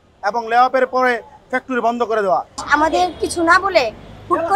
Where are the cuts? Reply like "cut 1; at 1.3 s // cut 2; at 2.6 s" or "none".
cut 1; at 2.6 s